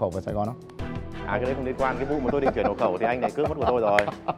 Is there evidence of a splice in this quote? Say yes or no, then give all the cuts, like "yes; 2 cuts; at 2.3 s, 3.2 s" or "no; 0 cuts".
no; 0 cuts